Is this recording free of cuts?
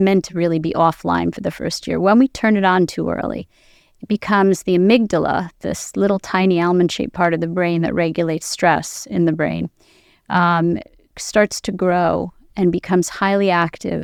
yes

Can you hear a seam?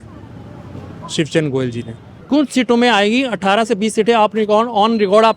yes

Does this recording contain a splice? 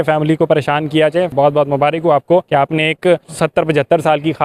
yes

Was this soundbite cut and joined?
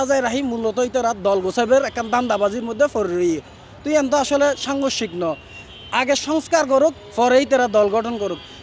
no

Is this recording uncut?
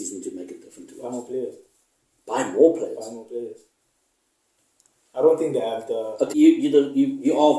no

